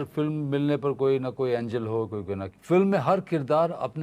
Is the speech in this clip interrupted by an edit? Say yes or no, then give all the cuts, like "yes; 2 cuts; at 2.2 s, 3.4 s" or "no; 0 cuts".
yes; 1 cut; at 2.5 s